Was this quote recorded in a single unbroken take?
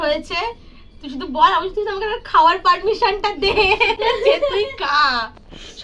yes; 0 cuts

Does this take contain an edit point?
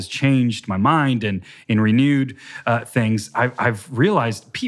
no; 0 cuts

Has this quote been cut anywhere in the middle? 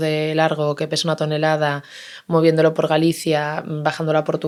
no; 0 cuts

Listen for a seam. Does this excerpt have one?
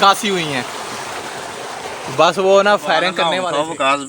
yes; 1 cut; at 3.2 s

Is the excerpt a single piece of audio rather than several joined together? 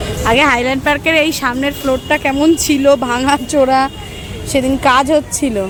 yes; 0 cuts

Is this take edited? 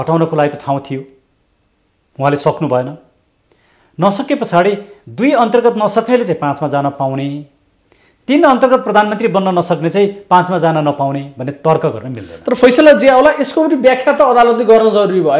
no; 0 cuts

